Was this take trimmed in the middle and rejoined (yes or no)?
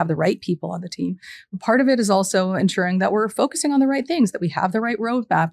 no